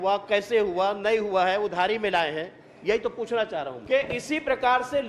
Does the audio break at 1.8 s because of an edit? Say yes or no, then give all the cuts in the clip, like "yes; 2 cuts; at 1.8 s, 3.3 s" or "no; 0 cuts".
no; 1 cut; at 3.8 s